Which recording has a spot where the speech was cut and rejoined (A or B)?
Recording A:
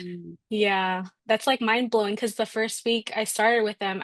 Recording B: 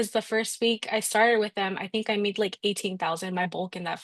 A